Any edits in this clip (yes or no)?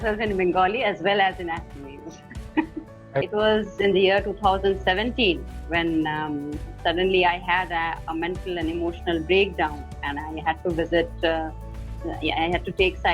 yes